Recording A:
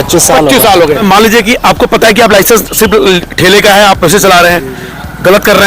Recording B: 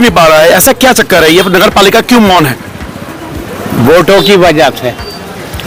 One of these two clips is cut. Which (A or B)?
A